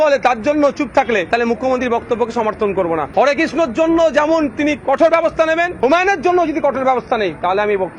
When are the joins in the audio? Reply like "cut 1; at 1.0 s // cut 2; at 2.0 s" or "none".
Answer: cut 1; at 1.3 s // cut 2; at 3.1 s // cut 3; at 5.7 s